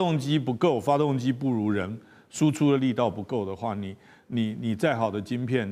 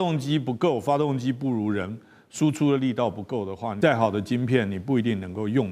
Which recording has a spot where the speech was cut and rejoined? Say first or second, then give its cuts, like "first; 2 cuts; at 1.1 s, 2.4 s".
second; 1 cut; at 3.8 s